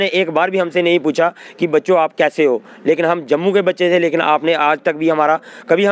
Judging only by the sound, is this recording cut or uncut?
uncut